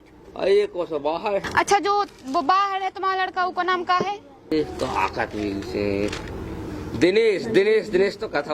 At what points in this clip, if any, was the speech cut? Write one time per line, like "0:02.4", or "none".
0:01.4
0:04.5